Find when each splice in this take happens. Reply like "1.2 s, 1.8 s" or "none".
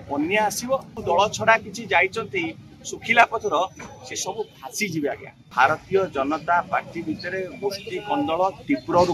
0.9 s, 5.5 s